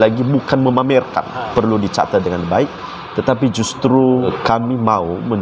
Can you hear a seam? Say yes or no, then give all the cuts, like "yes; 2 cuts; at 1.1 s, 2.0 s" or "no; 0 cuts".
yes; 2 cuts; at 1.5 s, 4.3 s